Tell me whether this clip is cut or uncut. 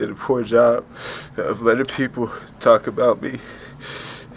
uncut